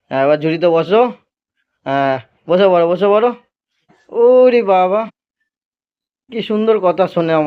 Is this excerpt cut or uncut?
uncut